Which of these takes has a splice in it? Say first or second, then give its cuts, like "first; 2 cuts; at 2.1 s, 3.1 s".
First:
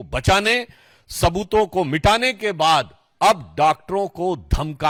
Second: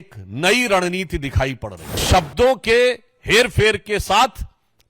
second; 1 cut; at 2.0 s